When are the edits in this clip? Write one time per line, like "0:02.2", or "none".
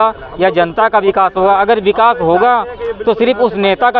none